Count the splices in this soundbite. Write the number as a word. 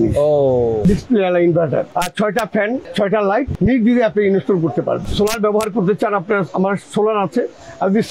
three